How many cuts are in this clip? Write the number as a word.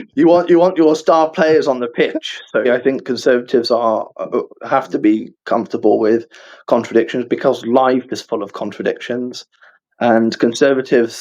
one